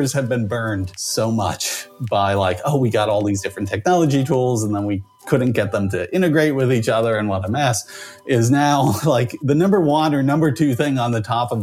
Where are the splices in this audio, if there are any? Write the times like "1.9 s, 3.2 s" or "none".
1.0 s

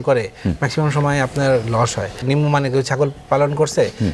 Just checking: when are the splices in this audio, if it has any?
2.2 s

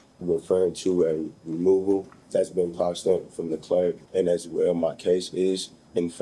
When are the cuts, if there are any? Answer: 2.2 s, 4.0 s

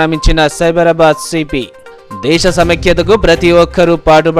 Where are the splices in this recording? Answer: none

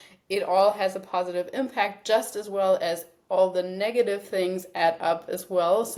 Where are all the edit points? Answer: none

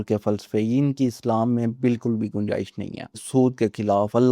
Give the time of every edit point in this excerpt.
3.2 s

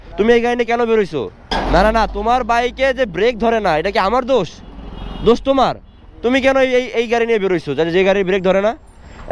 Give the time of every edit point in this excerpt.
1.4 s

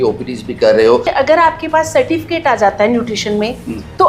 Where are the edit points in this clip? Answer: 1.1 s

